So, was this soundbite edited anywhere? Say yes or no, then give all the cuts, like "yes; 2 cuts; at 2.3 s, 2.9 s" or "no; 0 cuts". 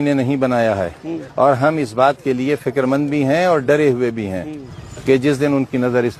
no; 0 cuts